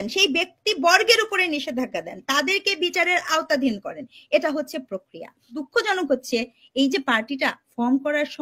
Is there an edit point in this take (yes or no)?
yes